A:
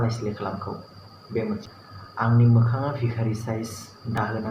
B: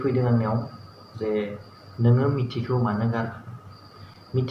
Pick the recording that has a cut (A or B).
A